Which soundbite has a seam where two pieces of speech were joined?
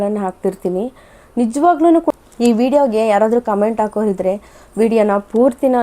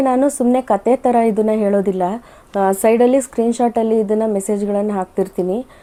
first; 1 cut; at 2.1 s

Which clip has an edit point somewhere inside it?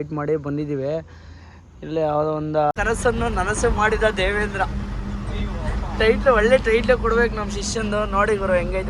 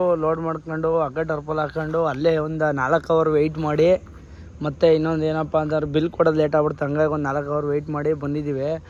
first; 1 cut; at 2.7 s

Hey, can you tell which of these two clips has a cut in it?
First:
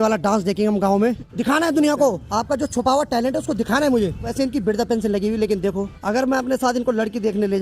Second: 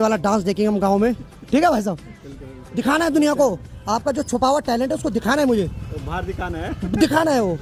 first; 4 cuts; at 1.3 s, 2.2 s, 4.3 s, 5.9 s

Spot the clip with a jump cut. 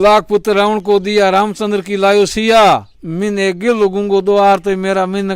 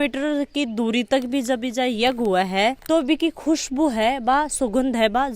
first; 1 cut; at 2.9 s

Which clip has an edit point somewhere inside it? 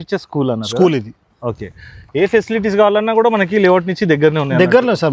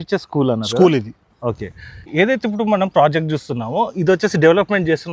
second; 1 cut; at 2.0 s

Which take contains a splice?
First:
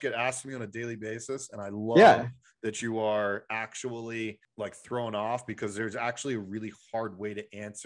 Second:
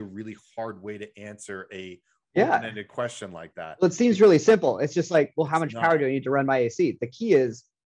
first; 1 cut; at 4.4 s

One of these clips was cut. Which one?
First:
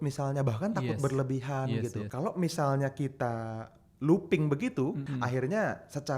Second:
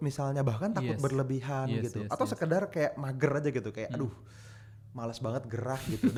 first; 2 cuts; at 2.0 s, 5.0 s

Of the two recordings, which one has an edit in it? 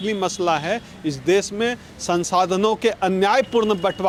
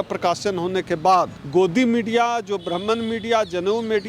second; 1 cut; at 1.4 s

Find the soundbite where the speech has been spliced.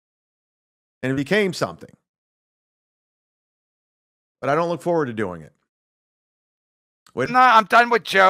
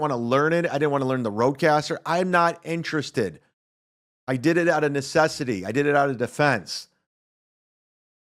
first; 1 cut; at 7.3 s

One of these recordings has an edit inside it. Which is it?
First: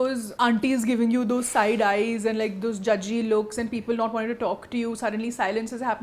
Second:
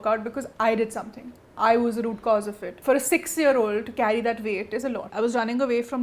second; 2 cuts; at 2.7 s, 5.1 s

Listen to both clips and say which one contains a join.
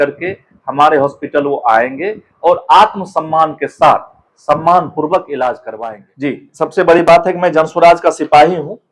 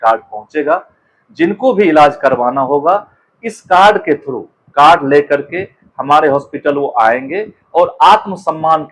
first; 1 cut; at 5.7 s

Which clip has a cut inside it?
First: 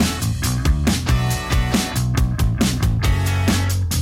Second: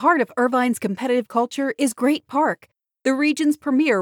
first; 1 cut; at 2.0 s

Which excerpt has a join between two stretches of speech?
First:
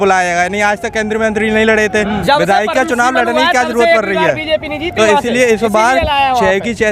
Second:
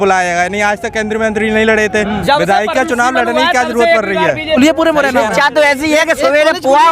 second; 1 cut; at 4.6 s

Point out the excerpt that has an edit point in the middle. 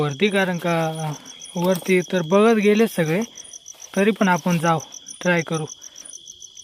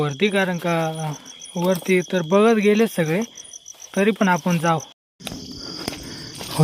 second; 1 cut; at 5.0 s

